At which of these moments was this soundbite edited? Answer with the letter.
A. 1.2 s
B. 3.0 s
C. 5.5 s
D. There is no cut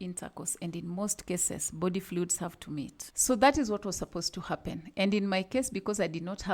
B